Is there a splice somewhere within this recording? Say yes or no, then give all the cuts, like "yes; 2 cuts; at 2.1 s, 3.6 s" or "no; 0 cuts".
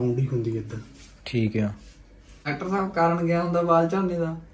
yes; 1 cut; at 2.5 s